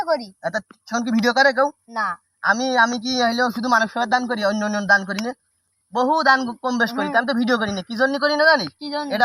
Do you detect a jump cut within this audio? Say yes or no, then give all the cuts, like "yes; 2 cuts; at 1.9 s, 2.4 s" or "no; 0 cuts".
no; 0 cuts